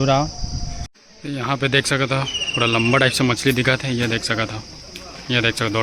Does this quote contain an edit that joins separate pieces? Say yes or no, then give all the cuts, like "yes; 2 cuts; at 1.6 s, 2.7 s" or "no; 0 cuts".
yes; 1 cut; at 0.9 s